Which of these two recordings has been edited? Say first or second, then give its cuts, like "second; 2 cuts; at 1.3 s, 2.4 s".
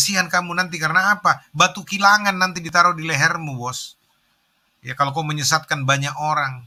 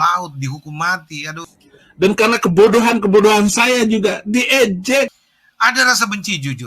second; 2 cuts; at 1.6 s, 5.2 s